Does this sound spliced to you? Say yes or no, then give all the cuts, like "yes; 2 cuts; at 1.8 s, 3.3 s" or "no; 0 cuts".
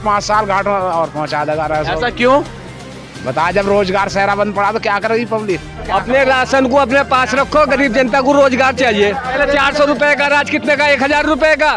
yes; 2 cuts; at 5.8 s, 9.4 s